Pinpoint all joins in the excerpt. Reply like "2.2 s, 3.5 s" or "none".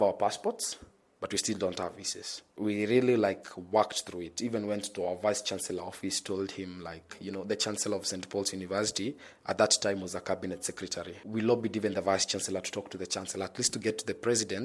2.5 s, 11.2 s